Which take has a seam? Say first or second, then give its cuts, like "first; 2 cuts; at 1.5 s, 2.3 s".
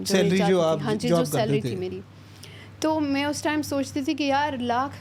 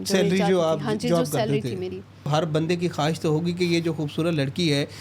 second; 1 cut; at 2.3 s